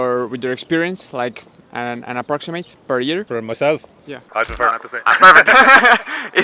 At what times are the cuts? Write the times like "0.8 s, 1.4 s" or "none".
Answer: none